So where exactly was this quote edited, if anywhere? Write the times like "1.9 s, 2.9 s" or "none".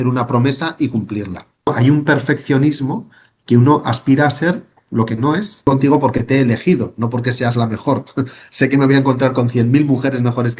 1.7 s, 5.7 s